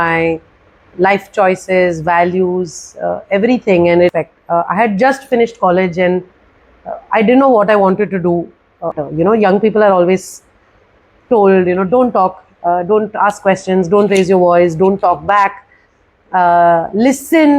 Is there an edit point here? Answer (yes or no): yes